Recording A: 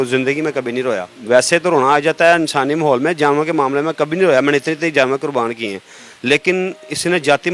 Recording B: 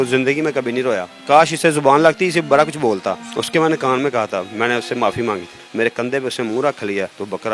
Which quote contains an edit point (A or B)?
B